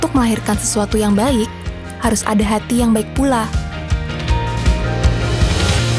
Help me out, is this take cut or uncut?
uncut